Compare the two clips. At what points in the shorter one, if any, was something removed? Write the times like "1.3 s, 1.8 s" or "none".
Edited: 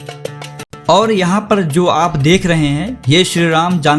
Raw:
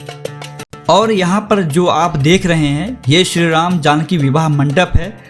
none